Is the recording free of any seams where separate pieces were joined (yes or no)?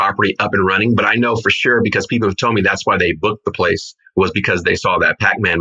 yes